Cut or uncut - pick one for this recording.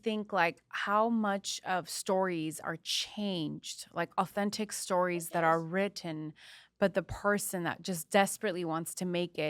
uncut